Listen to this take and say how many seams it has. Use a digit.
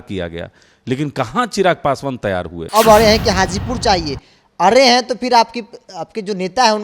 1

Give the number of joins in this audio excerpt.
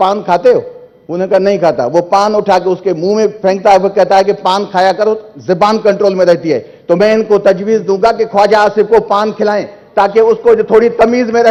0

